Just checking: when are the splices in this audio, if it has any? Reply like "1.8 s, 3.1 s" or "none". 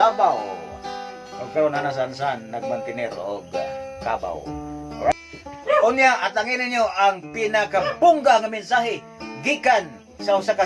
5.1 s